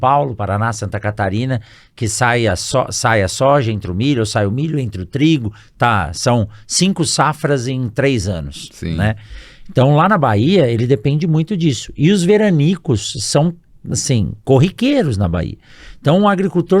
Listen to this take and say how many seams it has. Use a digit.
0